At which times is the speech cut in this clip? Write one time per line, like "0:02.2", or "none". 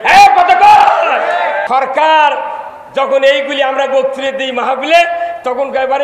0:01.6